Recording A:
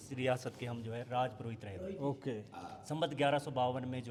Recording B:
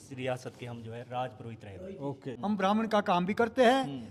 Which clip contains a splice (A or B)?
B